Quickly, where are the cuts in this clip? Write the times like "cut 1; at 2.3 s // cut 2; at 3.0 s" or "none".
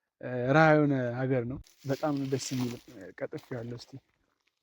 cut 1; at 1.7 s

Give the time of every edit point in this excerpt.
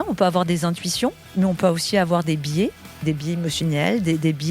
cut 1; at 1.2 s // cut 2; at 3.0 s

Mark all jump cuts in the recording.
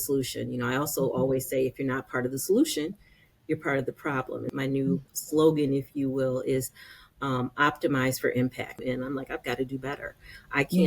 cut 1; at 4.5 s // cut 2; at 8.8 s

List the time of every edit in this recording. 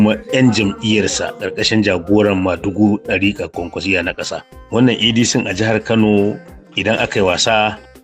cut 1; at 4.5 s

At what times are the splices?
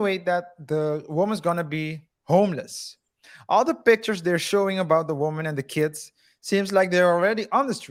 none

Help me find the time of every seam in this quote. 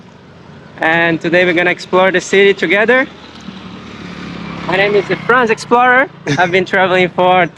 none

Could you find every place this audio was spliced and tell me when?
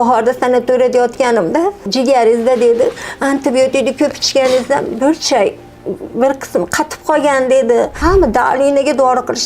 cut 1; at 1.9 s // cut 2; at 8.0 s

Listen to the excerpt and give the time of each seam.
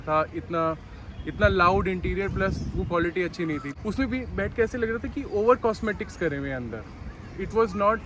none

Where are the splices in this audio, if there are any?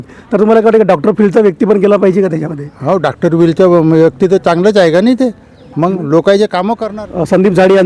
cut 1; at 6.8 s

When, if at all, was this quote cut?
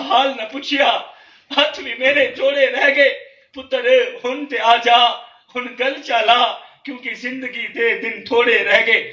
none

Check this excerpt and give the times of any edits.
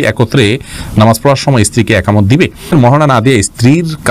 cut 1; at 2.7 s

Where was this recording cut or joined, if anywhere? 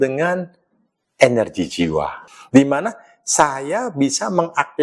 cut 1; at 2.2 s

